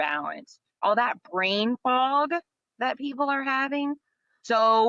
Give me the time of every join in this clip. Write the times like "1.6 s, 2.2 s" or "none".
0.8 s, 4.0 s